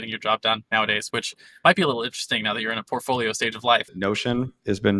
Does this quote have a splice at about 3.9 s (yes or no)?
yes